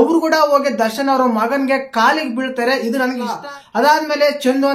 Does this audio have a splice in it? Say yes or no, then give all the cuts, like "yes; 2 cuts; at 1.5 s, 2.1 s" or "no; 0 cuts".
yes; 1 cut; at 3.4 s